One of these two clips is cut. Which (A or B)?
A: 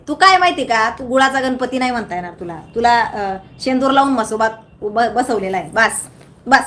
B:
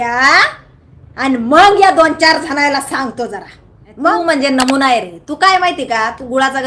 B